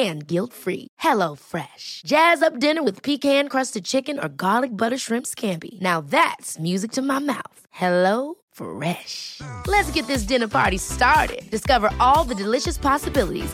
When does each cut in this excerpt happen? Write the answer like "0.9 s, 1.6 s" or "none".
none